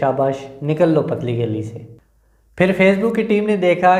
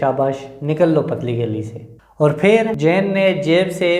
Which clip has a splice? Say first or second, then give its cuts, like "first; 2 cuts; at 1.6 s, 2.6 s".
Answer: second; 2 cuts; at 2.0 s, 2.7 s